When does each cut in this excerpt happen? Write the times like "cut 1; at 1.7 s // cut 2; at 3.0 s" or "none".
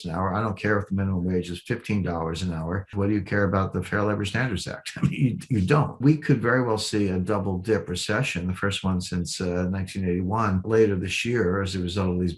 cut 1; at 2.9 s // cut 2; at 6.0 s // cut 3; at 10.6 s